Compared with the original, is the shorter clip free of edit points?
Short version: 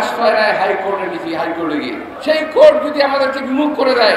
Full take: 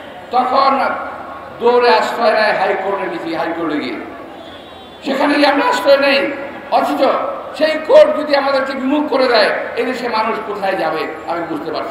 no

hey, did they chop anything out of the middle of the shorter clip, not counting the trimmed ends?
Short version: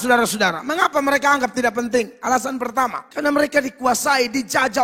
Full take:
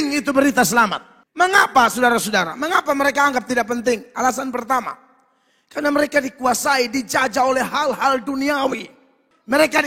yes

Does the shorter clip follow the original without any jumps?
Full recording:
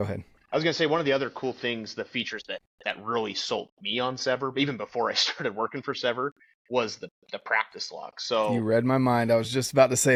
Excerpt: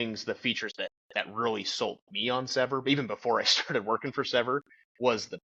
yes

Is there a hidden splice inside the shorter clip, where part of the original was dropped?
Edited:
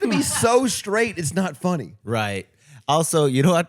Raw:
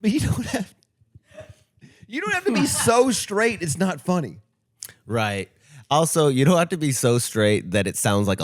yes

